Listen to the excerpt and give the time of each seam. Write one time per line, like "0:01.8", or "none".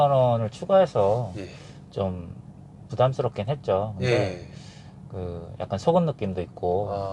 none

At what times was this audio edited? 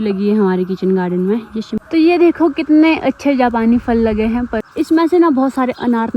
0:01.7
0:04.6

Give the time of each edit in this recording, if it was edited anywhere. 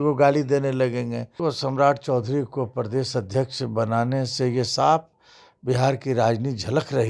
0:01.3

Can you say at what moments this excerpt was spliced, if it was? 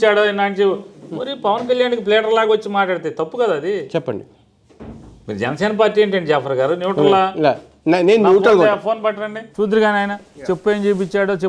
0:09.4

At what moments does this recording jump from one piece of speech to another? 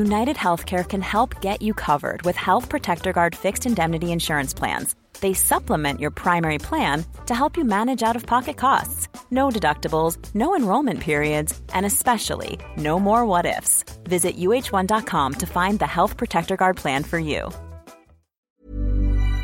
0:18.4

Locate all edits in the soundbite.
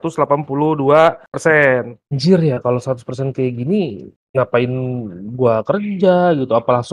0:02.0

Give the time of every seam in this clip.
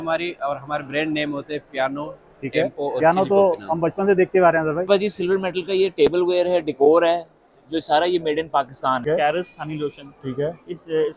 0:04.9
0:09.0

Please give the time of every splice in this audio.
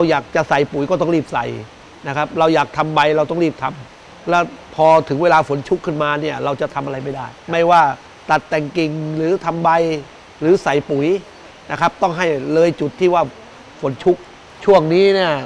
none

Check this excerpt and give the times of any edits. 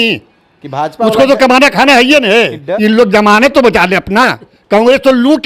0:02.6
0:04.5

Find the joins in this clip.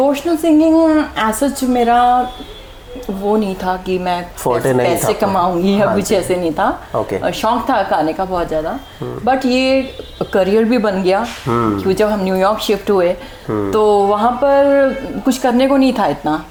none

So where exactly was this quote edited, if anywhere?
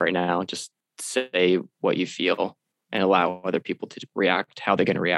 none

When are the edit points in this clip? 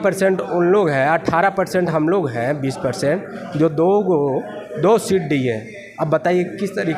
none

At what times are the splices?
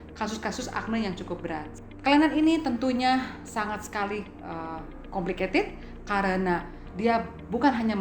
0:01.7

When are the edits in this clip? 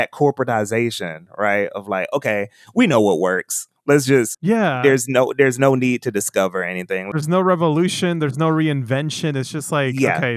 0:04.4
0:07.1

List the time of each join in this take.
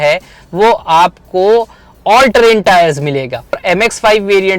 0:03.6

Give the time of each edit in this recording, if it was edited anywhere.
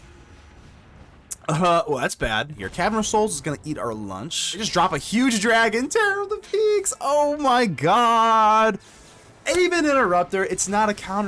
0:02.6
0:04.6

